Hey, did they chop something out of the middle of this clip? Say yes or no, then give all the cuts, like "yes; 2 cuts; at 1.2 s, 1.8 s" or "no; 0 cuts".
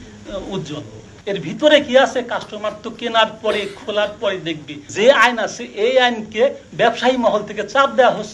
yes; 2 cuts; at 1.0 s, 4.8 s